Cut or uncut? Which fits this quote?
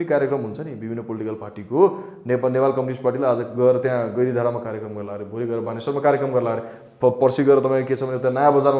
uncut